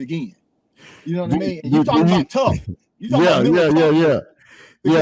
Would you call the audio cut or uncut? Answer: uncut